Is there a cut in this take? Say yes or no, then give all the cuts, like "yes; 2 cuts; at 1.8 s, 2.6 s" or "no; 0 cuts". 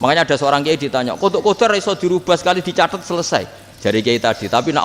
no; 0 cuts